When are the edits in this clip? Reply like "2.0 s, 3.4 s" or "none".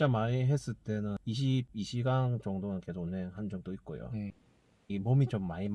4.4 s